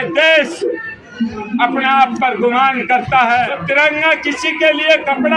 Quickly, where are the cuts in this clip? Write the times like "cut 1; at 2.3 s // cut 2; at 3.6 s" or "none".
cut 1; at 3.5 s